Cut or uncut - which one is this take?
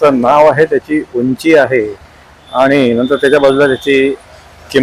uncut